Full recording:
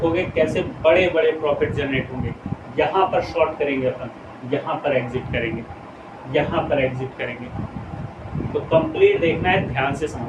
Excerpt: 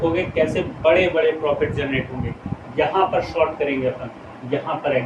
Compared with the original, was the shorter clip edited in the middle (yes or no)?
no